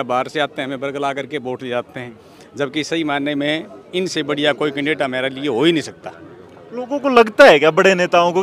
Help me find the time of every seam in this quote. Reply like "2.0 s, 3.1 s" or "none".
none

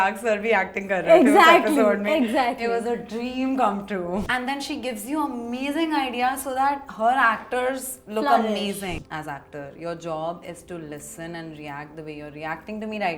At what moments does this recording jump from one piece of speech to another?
4.3 s, 8.9 s

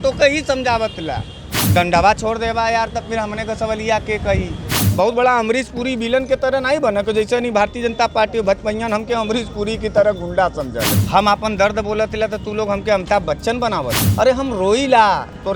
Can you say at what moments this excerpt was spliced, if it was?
4.8 s, 11.0 s, 14.0 s

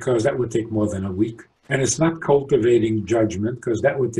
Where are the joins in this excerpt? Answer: 1.5 s

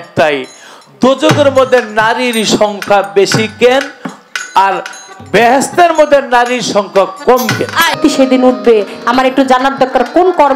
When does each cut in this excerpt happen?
7.9 s

